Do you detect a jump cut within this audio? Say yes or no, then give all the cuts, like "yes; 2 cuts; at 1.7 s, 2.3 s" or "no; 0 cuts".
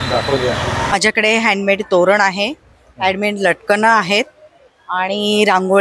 yes; 1 cut; at 0.9 s